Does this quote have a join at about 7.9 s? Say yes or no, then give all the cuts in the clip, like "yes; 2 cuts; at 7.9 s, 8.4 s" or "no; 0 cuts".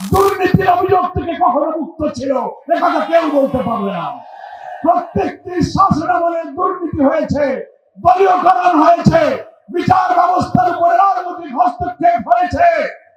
no; 0 cuts